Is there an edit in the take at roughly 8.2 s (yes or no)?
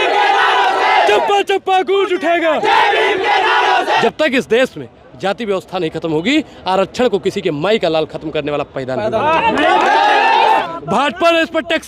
no